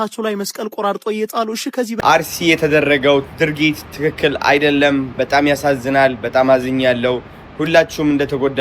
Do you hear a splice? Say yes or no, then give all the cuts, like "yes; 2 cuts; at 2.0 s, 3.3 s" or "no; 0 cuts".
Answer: yes; 1 cut; at 1.9 s